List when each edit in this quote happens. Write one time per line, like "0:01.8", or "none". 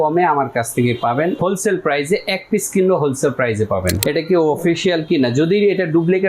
0:01.4
0:04.0